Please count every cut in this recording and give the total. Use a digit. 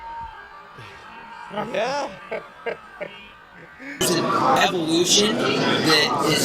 1